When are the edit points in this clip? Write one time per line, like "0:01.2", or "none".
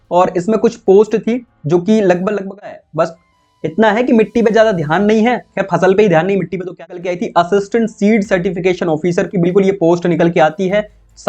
0:02.7
0:06.8